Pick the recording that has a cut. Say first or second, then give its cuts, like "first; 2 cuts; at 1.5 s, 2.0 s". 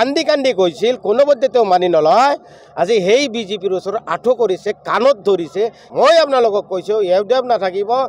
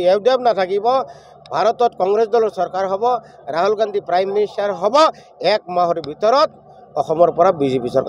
first; 1 cut; at 5.8 s